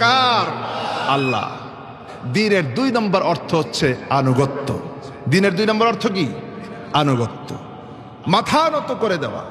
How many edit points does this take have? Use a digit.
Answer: 1